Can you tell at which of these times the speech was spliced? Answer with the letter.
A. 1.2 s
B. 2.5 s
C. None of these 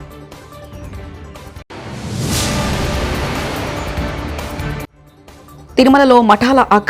A